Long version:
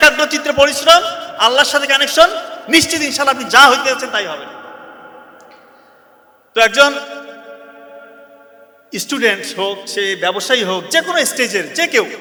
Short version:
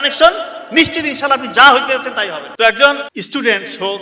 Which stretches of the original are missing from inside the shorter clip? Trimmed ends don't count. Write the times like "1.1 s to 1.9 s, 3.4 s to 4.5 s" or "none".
4.4 s to 6.4 s, 7.1 s to 8.9 s